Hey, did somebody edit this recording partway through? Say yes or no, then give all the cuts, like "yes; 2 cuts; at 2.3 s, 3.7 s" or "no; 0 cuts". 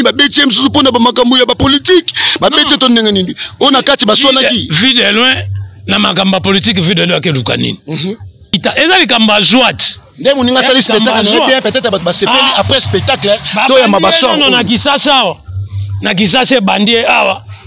yes; 1 cut; at 8.5 s